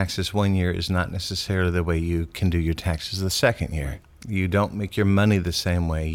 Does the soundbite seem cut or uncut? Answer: uncut